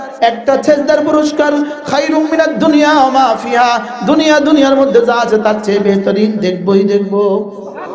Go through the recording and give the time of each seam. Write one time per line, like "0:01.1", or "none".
none